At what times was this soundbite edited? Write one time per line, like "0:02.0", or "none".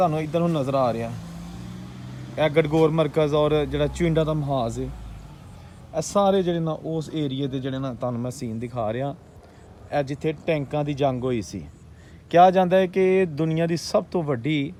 none